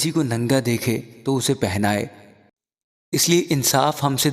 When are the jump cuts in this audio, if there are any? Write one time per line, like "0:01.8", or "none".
0:02.4